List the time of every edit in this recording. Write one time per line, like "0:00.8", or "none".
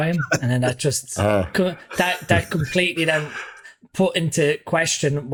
none

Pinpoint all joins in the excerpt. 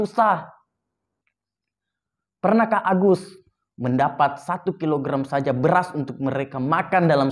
none

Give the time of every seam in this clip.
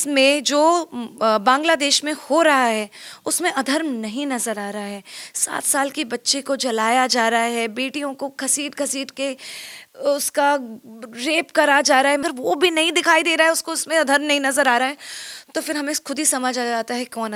none

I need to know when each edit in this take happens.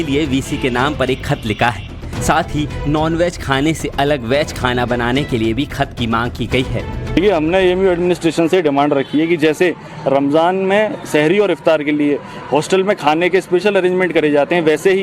0:09.8

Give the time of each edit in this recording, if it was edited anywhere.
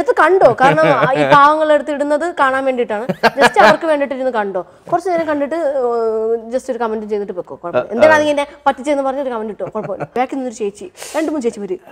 0:10.1

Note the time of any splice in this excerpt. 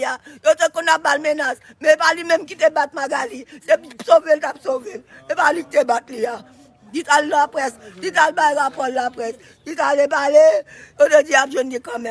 none

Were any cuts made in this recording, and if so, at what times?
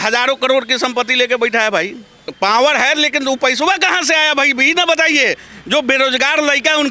0:02.3

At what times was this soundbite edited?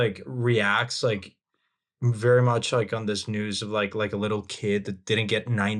none

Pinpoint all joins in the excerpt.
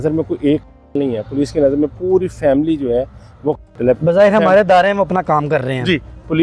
none

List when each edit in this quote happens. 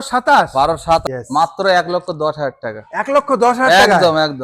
0:01.0

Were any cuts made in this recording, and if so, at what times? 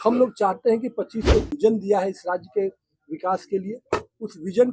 0:01.5

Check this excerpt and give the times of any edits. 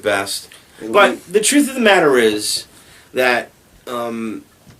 0:01.7

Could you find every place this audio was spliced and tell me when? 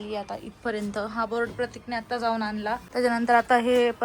0:02.8

